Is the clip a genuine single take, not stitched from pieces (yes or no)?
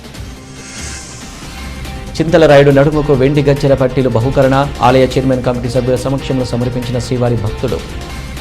yes